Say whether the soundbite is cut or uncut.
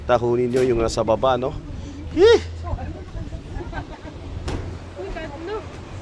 uncut